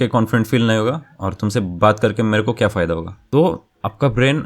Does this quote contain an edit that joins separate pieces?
yes; 1 cut; at 3.3 s

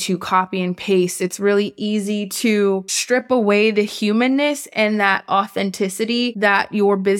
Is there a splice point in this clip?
no; 0 cuts

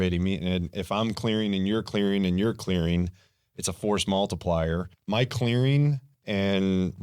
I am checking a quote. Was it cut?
yes; 1 cut; at 4.9 s

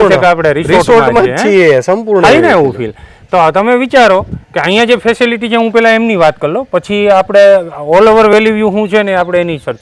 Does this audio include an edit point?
no; 0 cuts

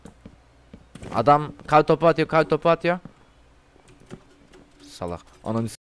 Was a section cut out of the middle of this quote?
no; 0 cuts

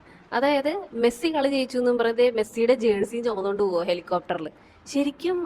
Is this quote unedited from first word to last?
yes; 0 cuts

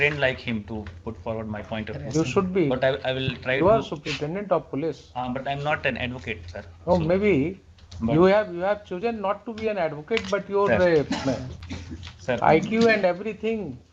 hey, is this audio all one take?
yes; 0 cuts

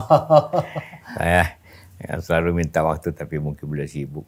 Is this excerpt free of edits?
yes; 0 cuts

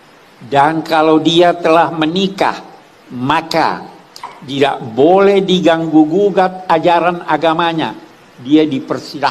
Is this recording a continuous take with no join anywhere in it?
yes; 0 cuts

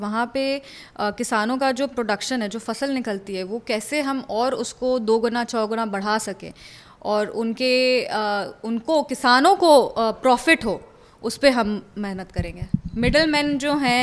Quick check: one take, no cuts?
yes; 0 cuts

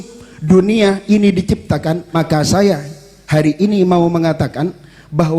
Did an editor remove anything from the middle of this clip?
yes; 1 cut; at 2.1 s

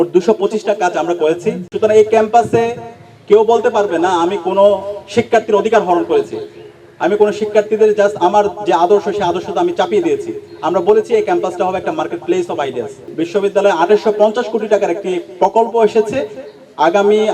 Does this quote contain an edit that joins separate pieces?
yes; 2 cuts; at 1.7 s, 13.0 s

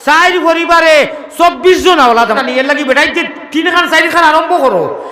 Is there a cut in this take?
yes; 1 cut; at 2.4 s

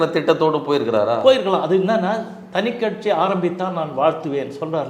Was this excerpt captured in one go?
yes; 0 cuts

